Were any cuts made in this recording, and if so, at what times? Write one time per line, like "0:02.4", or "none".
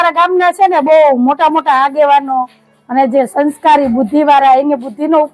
none